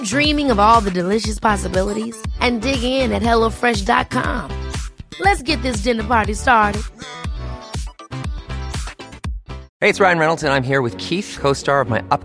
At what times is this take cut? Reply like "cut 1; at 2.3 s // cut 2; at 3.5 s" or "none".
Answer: cut 1; at 9.6 s